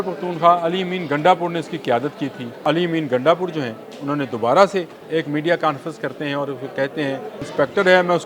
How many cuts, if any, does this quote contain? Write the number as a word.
three